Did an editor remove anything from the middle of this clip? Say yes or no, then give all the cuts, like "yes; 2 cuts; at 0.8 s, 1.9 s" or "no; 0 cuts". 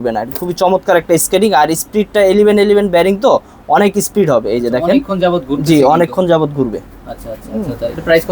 no; 0 cuts